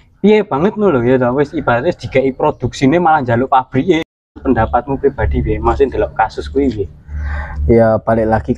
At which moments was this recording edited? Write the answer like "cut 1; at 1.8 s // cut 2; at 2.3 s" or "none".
cut 1; at 4.4 s